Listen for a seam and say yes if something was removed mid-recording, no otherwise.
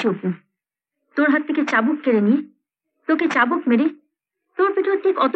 no